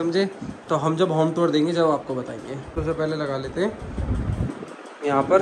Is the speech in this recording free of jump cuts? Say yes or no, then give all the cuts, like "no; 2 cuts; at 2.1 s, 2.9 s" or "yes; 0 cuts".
yes; 0 cuts